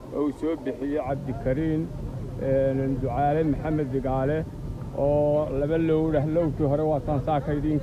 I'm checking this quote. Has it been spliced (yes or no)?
no